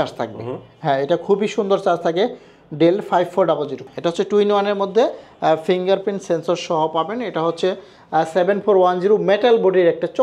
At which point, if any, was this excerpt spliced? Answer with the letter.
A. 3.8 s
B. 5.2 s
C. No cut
A